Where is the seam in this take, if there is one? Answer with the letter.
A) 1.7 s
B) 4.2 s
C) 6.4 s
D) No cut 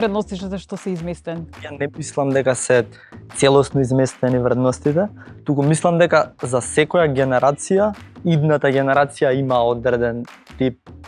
A